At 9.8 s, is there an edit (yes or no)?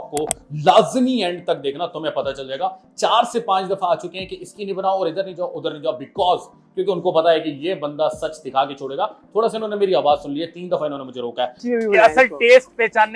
no